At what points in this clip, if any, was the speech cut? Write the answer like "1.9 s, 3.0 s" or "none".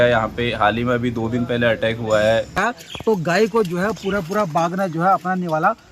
2.5 s